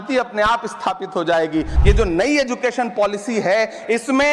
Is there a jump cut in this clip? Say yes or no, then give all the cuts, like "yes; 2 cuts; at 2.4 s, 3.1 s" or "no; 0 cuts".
yes; 1 cut; at 1.7 s